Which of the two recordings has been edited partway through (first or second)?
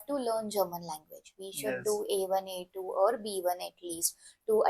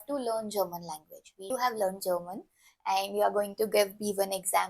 second